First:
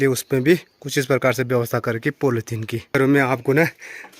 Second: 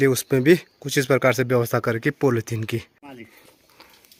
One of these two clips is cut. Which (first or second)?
first